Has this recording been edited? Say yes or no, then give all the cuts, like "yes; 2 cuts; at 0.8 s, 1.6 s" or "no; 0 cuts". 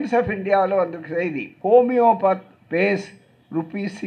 yes; 1 cut; at 1.5 s